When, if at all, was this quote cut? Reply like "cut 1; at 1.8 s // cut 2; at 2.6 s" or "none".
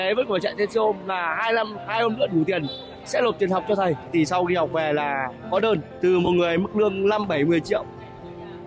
cut 1; at 4.1 s // cut 2; at 5.9 s